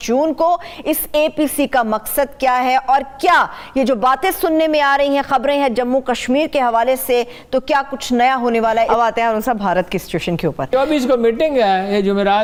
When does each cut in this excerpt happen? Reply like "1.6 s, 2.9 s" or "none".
none

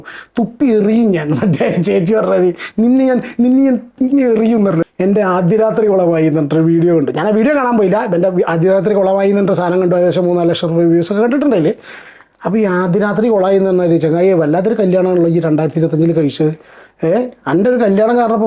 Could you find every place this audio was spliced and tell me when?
4.8 s

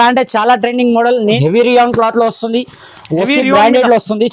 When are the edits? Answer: 1.4 s

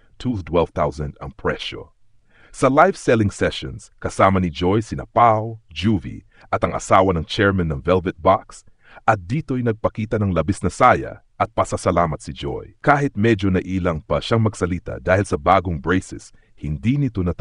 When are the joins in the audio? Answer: none

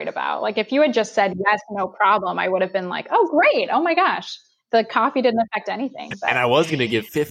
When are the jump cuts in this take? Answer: 6.3 s

